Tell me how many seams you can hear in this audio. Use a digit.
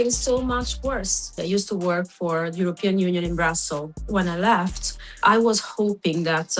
3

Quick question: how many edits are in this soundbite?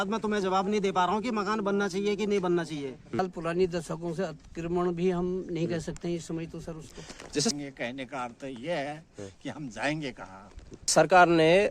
3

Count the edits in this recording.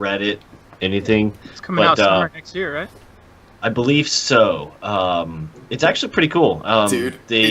0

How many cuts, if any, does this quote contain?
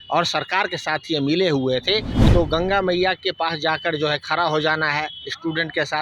1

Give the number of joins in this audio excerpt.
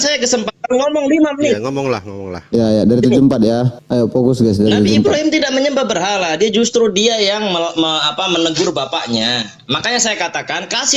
1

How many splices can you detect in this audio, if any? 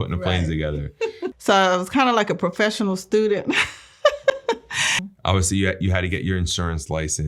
2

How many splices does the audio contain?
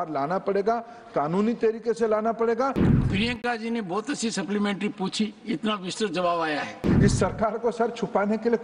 2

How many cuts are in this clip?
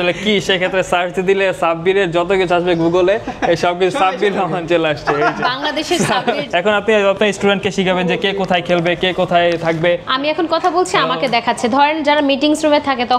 2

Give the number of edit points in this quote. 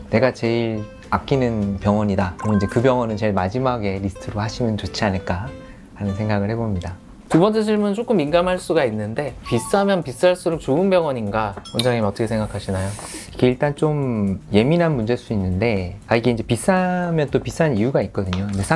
0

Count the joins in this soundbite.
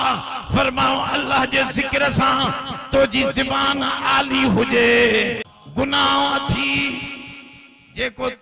1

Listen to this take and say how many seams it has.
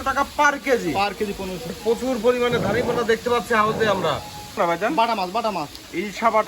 2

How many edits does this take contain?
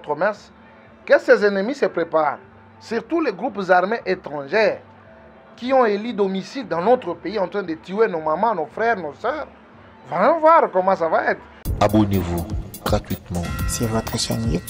1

